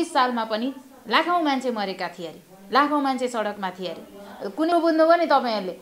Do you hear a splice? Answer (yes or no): yes